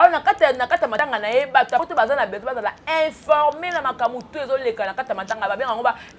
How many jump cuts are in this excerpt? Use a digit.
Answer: 2